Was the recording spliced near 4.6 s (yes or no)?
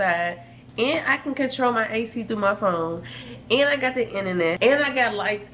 yes